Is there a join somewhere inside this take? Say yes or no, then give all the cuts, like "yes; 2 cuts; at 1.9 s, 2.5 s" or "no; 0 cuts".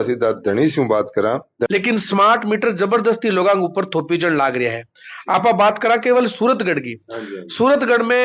yes; 1 cut; at 1.7 s